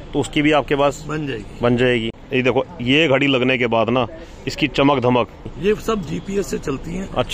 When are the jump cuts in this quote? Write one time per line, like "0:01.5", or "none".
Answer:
0:02.2
0:05.5